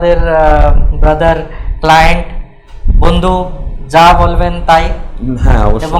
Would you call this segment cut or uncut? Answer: uncut